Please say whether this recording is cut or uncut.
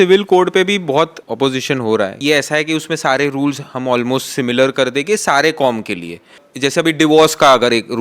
cut